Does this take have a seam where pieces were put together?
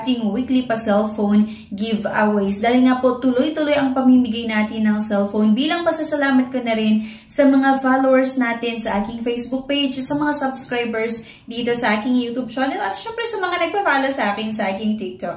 no; 0 cuts

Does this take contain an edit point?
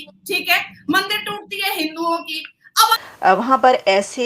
yes; 1 cut; at 2.9 s

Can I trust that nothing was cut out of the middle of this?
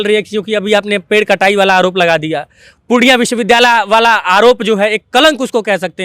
yes; 0 cuts

